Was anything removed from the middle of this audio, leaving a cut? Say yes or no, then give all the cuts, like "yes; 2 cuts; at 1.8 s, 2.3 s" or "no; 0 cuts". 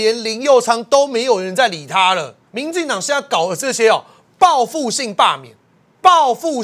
yes; 1 cut; at 2.4 s